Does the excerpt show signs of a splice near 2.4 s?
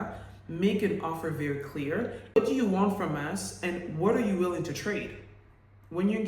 yes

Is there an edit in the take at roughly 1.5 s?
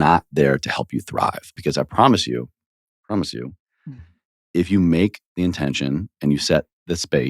yes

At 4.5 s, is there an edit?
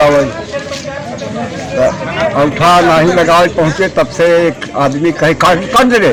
no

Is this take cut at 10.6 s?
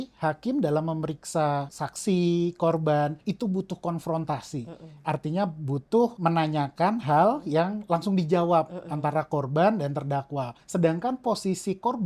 yes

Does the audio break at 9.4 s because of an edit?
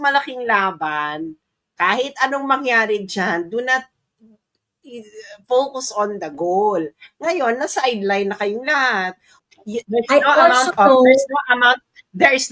yes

